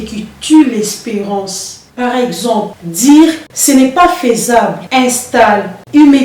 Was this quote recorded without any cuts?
yes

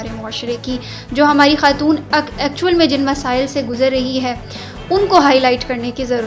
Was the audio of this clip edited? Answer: no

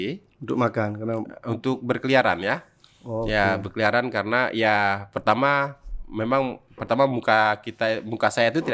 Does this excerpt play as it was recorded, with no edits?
yes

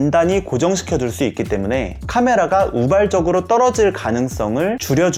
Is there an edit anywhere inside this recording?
no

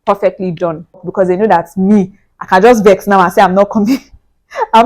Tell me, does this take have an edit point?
yes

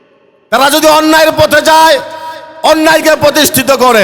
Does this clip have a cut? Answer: no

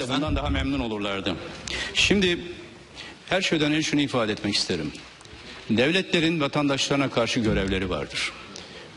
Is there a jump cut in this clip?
yes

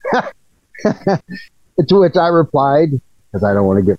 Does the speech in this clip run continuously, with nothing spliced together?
yes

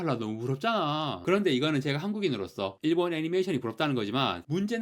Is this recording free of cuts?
no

